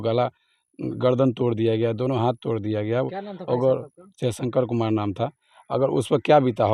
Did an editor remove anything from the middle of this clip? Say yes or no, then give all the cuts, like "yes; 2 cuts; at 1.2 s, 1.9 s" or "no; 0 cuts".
no; 0 cuts